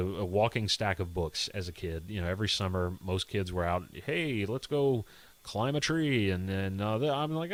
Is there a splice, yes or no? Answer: no